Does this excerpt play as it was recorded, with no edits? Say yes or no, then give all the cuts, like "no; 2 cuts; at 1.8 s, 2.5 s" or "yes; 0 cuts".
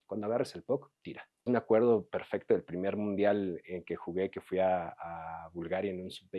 no; 1 cut; at 1.5 s